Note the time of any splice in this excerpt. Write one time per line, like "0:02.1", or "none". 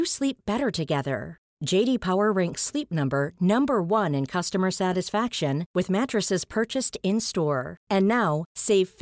none